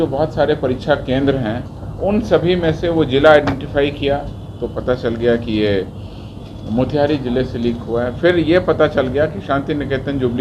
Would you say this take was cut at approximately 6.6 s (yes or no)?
no